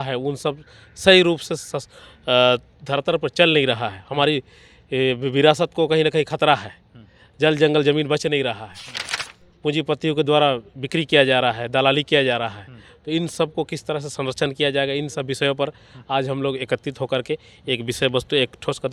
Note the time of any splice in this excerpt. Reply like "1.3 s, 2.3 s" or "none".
none